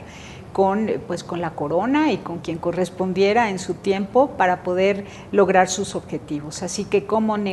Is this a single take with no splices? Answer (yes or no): no